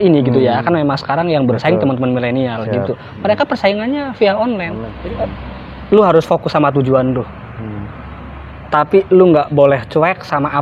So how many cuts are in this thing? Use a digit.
1